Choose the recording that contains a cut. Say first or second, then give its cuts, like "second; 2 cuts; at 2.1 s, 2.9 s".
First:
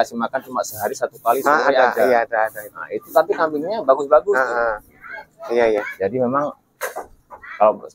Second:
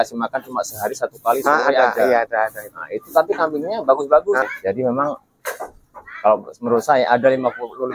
second; 1 cut; at 4.5 s